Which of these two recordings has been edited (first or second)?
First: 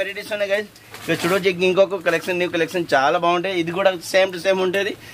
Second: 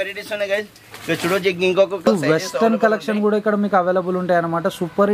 second